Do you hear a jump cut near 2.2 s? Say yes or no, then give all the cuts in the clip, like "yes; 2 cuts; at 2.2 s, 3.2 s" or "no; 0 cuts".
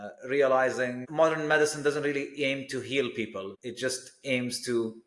no; 2 cuts; at 1.0 s, 3.6 s